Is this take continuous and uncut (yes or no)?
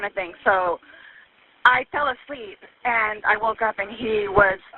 yes